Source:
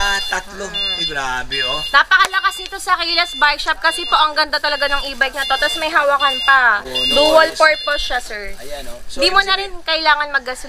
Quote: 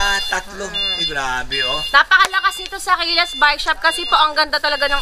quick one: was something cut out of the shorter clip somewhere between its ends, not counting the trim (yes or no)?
no